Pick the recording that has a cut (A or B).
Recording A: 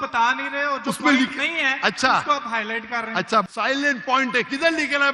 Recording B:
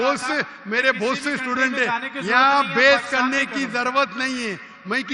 A